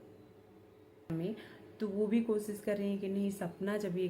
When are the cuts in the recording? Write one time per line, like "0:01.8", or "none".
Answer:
0:01.1